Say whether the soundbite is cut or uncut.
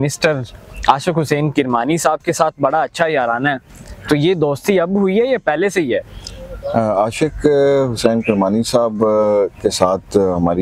uncut